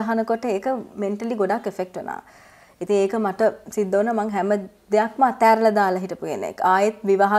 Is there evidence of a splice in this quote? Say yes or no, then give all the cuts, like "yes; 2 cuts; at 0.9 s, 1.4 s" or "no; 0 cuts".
no; 0 cuts